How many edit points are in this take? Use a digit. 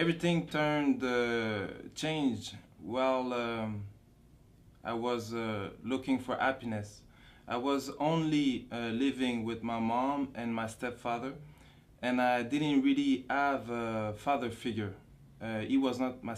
1